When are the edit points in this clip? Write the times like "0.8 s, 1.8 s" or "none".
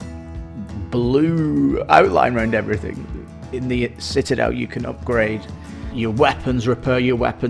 3.4 s, 5.8 s